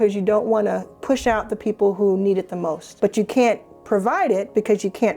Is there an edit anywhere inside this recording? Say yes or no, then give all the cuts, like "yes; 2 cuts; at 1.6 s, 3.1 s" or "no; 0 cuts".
yes; 2 cuts; at 0.9 s, 2.8 s